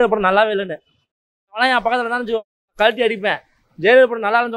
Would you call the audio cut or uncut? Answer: uncut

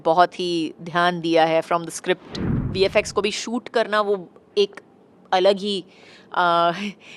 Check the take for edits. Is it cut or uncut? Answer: cut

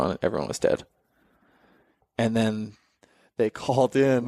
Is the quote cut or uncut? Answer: uncut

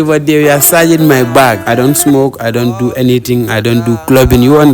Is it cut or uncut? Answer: cut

